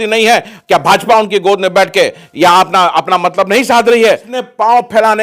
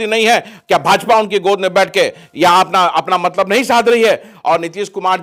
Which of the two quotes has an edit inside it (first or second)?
first